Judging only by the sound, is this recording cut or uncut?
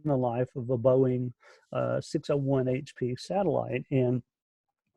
uncut